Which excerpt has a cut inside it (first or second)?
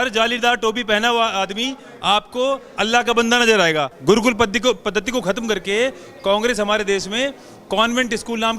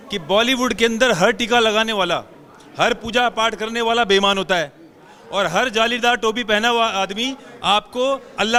first